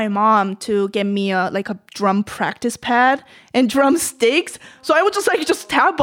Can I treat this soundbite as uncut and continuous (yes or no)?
yes